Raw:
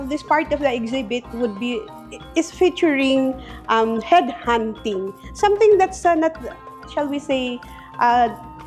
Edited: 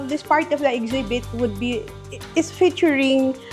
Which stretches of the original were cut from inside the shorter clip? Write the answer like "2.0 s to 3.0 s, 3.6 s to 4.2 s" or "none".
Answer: none